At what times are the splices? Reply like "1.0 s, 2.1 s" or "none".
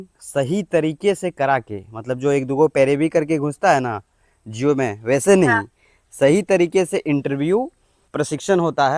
8.0 s